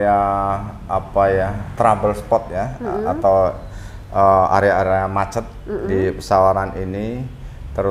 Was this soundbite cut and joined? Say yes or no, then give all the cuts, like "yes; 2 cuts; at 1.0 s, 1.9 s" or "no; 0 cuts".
no; 0 cuts